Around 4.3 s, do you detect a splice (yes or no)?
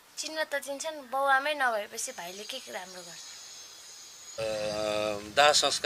yes